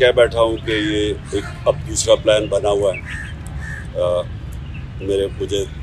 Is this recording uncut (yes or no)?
yes